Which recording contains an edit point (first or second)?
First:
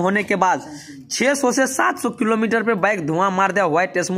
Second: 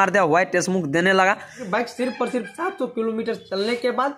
second